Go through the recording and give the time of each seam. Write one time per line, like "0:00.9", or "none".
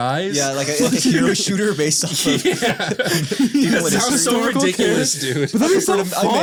none